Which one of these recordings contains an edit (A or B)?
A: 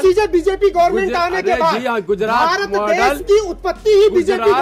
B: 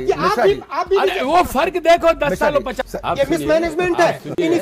B